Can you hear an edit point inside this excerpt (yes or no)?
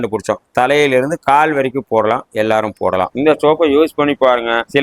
yes